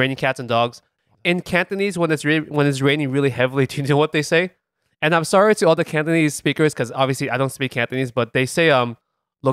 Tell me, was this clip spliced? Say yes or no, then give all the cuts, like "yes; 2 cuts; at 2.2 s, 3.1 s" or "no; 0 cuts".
yes; 1 cut; at 1.1 s